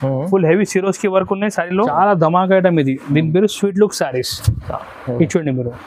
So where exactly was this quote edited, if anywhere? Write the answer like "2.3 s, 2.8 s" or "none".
1.9 s